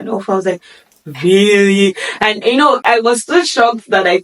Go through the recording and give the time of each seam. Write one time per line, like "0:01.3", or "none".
0:02.8